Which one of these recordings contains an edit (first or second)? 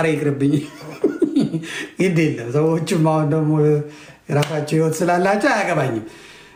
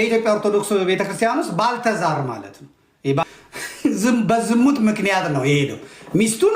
second